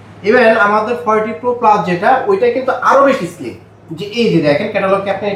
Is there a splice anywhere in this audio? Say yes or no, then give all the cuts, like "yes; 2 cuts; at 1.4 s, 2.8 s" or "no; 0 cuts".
no; 0 cuts